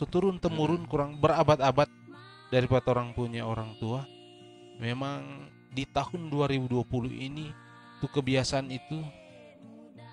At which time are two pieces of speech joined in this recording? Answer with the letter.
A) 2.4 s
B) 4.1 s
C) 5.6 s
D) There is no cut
D